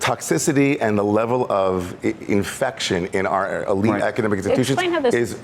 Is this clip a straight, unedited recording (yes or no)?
yes